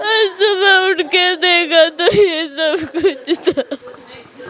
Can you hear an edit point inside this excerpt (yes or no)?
no